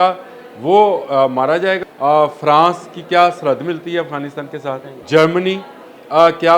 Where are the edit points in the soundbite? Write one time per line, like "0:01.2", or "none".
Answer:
0:01.8
0:04.9